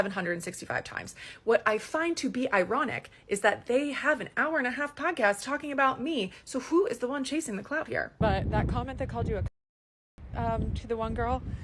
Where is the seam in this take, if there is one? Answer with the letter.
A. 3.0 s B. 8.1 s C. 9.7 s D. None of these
B